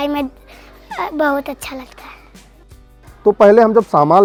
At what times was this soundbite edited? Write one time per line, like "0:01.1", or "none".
none